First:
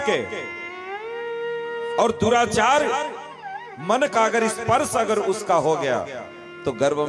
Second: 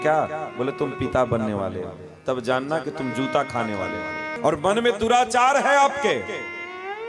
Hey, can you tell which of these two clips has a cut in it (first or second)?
second